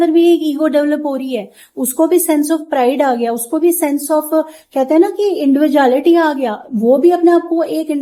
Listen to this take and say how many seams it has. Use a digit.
0